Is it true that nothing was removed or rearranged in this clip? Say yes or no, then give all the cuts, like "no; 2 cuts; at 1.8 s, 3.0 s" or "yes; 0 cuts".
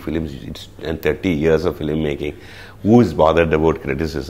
yes; 0 cuts